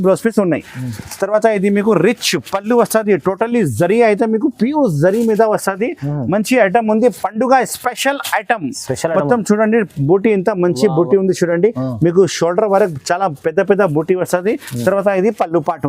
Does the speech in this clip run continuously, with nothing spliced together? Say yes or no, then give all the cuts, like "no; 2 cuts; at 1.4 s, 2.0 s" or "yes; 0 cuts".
no; 1 cut; at 14.7 s